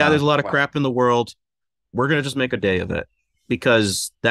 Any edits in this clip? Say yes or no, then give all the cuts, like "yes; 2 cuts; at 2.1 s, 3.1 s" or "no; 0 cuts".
no; 0 cuts